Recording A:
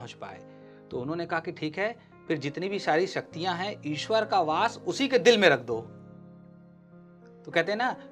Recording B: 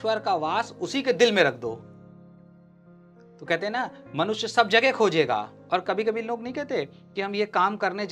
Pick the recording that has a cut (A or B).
B